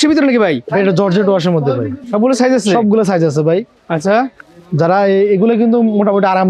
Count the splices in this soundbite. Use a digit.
0